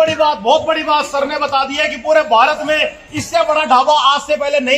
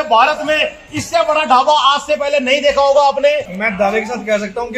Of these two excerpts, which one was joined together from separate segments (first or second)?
second